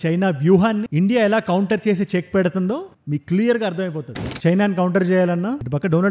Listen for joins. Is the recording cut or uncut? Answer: cut